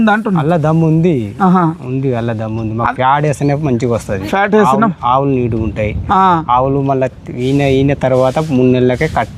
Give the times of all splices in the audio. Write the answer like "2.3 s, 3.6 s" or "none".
none